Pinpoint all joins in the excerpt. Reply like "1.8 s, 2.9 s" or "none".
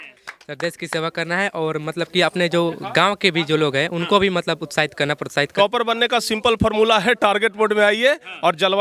5.5 s